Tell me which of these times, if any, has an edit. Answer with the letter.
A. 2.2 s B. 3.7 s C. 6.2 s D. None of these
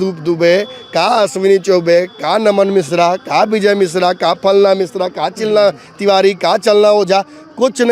D